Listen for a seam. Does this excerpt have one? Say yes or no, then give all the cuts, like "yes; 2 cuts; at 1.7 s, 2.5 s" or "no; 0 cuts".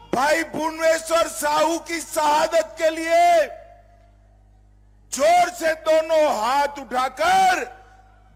no; 0 cuts